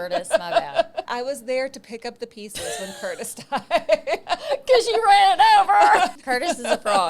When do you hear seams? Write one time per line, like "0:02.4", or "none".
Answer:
0:01.1
0:04.2
0:06.1